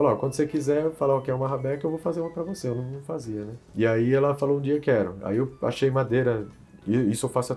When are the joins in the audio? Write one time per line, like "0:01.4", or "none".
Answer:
none